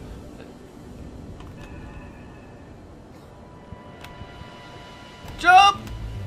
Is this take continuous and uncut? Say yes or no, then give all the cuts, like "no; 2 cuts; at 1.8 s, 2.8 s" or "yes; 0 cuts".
yes; 0 cuts